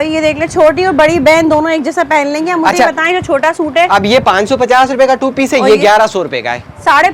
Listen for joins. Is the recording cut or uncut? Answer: uncut